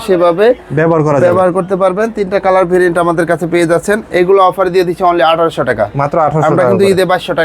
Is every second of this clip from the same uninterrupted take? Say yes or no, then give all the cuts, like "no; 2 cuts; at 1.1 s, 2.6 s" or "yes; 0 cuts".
yes; 0 cuts